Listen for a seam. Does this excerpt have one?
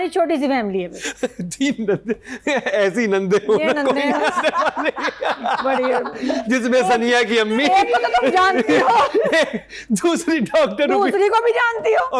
no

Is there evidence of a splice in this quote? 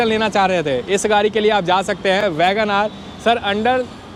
no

